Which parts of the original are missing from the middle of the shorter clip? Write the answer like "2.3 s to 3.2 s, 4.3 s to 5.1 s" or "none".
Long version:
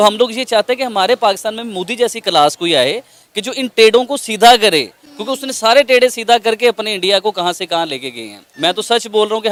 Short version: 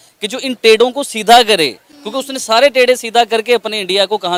none